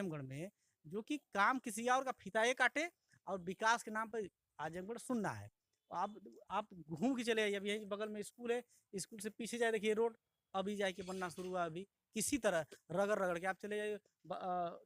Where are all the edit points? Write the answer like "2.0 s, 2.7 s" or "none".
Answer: none